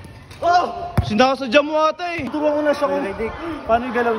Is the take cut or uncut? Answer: cut